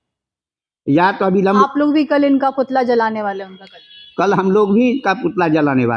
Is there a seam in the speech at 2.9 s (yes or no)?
no